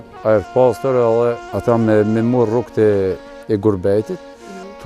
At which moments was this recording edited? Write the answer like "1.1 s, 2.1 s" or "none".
1.5 s